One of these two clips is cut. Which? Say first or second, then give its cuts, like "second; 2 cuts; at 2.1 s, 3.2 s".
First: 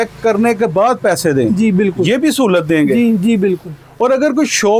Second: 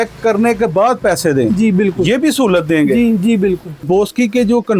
second; 1 cut; at 3.8 s